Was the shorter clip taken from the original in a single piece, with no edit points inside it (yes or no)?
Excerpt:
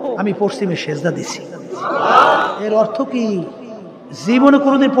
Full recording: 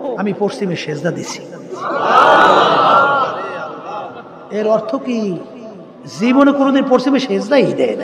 no